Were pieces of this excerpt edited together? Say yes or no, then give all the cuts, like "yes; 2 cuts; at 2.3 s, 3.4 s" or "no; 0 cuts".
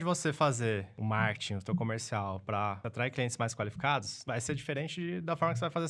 yes; 3 cuts; at 0.9 s, 2.8 s, 4.1 s